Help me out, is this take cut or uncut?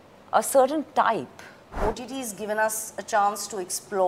cut